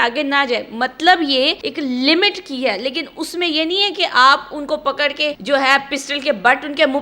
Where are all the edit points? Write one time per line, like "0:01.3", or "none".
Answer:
0:01.6
0:05.4